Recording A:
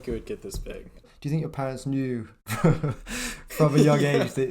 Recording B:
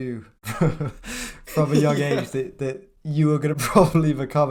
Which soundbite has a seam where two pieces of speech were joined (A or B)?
A